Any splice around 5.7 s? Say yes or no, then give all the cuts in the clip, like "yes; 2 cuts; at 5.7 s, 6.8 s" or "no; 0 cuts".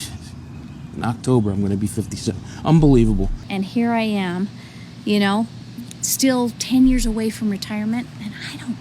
no; 1 cut; at 3.5 s